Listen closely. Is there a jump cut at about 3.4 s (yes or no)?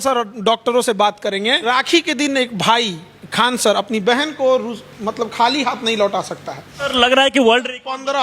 no